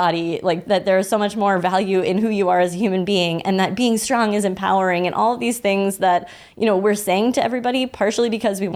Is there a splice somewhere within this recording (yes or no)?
no